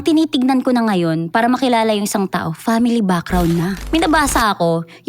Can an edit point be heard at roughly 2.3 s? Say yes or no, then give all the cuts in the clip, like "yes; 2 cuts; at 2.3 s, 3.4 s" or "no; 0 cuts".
no; 1 cut; at 3.8 s